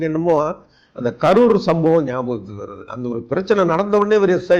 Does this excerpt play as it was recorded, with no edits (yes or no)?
yes